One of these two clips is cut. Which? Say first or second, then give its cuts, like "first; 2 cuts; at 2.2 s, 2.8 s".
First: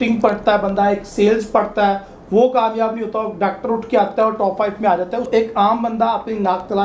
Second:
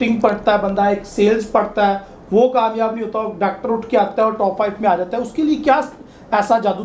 first; 1 cut; at 5.3 s